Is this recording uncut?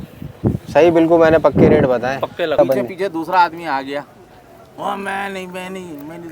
no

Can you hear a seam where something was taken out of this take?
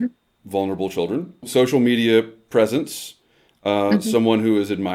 yes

